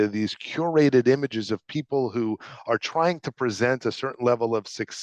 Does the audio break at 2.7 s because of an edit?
no; 0 cuts

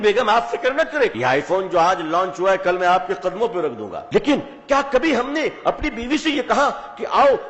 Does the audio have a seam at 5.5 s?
no; 2 cuts; at 1.1 s, 3.9 s

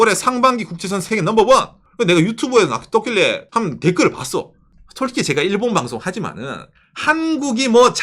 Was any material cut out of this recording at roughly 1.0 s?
yes; 3 cuts; at 1.0 s, 1.8 s, 3.4 s

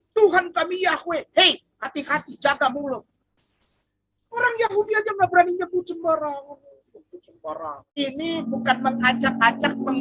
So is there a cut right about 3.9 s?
no; 1 cut; at 8.0 s

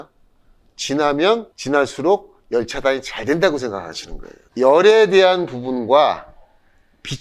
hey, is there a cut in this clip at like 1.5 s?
yes; 1 cut; at 1.5 s

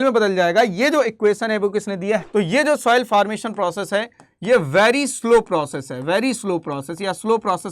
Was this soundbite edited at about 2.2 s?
yes; 1 cut; at 2.2 s

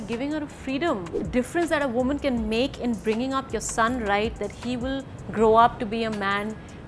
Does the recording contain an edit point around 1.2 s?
yes; 1 cut; at 1.2 s

